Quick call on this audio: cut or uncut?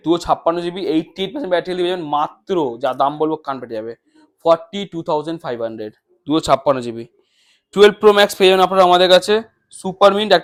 uncut